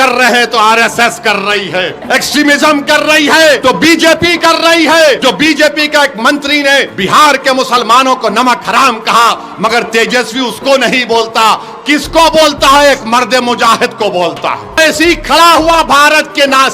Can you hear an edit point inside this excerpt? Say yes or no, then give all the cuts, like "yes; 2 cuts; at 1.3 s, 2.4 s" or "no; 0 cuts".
yes; 5 cuts; at 2.0 s, 3.6 s, 5.2 s, 6.9 s, 14.8 s